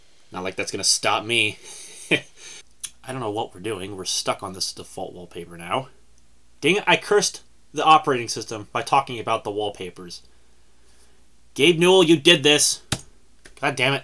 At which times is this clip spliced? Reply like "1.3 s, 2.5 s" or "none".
2.4 s